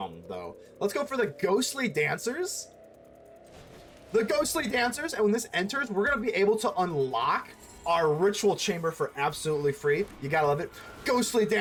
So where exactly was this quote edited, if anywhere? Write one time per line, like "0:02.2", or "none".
none